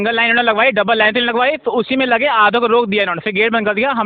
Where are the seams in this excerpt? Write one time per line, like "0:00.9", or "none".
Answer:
none

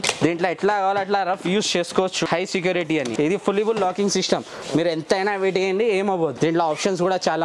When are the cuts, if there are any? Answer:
0:02.3
0:03.1
0:06.3

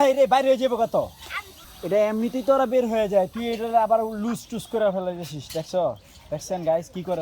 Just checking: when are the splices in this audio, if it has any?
none

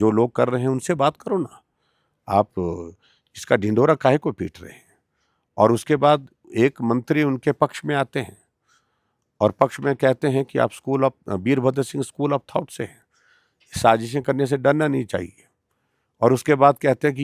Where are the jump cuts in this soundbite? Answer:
none

